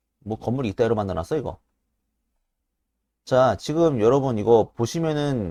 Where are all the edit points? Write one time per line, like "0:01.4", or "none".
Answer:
none